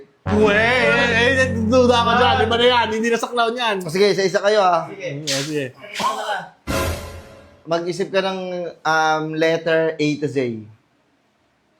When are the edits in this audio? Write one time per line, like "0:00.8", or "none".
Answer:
none